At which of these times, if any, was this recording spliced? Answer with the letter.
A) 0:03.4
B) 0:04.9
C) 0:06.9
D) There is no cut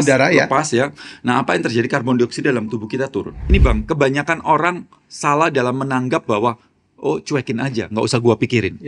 A